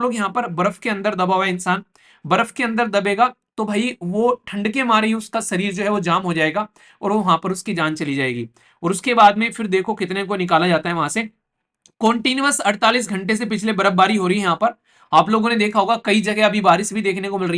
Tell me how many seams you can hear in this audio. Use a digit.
0